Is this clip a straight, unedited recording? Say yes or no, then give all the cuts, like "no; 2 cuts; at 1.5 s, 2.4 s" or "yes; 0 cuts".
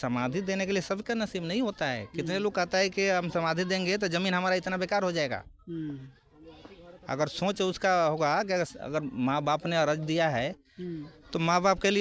yes; 0 cuts